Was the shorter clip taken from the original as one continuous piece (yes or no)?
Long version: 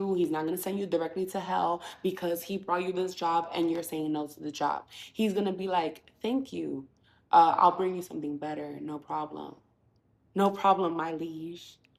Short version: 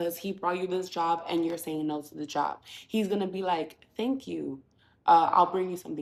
yes